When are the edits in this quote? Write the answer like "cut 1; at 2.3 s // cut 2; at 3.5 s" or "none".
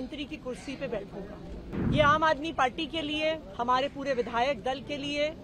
cut 1; at 1.7 s